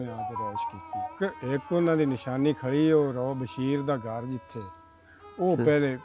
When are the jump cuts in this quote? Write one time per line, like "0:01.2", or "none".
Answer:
0:01.2